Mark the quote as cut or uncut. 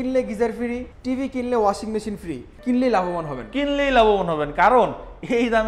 cut